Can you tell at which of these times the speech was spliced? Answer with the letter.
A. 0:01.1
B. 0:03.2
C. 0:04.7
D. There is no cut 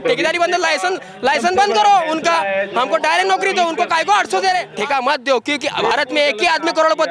C